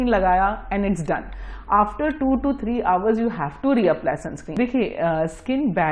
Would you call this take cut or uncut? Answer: cut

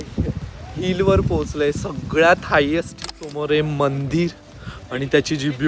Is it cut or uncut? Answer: cut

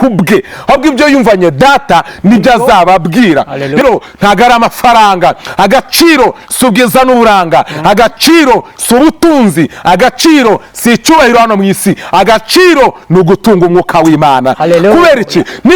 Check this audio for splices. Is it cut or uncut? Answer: cut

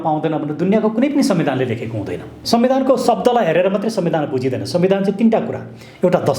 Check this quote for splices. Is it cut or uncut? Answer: cut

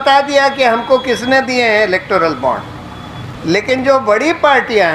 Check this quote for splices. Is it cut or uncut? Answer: uncut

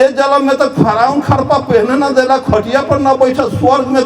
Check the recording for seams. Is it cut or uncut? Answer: uncut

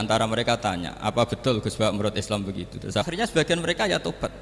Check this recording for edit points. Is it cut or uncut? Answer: cut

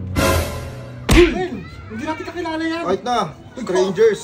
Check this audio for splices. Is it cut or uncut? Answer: uncut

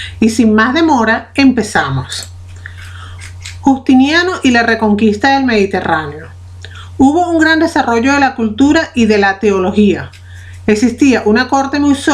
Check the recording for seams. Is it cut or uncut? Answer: cut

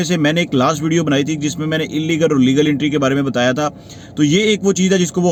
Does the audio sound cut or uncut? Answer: uncut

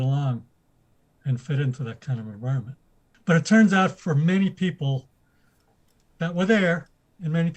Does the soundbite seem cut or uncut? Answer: uncut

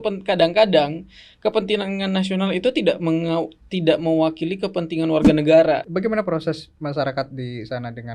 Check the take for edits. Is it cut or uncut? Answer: cut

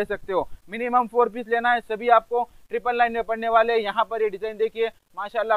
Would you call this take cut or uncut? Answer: uncut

